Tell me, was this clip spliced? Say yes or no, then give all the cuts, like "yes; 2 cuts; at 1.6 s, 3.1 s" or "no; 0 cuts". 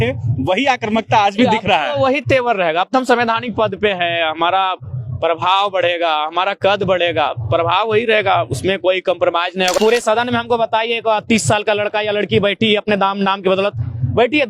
yes; 1 cut; at 9.8 s